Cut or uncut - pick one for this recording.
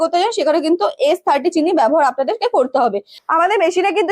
cut